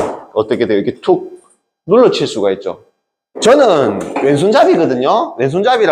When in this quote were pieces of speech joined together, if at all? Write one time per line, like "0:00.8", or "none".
0:03.4